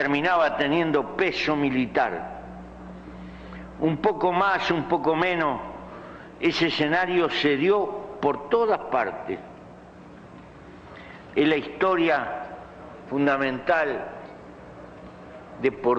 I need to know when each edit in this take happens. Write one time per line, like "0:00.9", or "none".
none